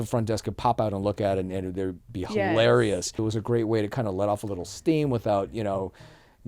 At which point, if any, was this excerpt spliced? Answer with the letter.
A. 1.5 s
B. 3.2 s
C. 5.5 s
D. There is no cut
B